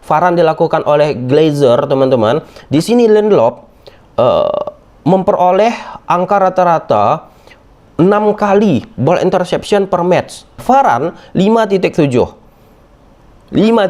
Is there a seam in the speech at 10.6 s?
yes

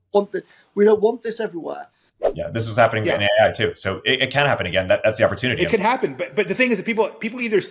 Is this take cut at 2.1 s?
yes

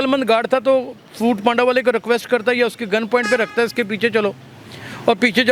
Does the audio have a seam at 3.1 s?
no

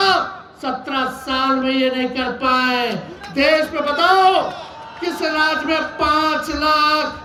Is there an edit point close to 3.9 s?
no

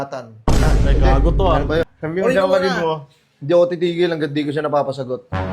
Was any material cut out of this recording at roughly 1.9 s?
yes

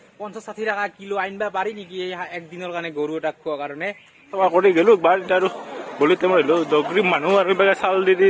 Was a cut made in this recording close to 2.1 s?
no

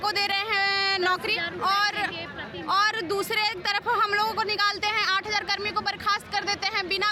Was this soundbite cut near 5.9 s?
no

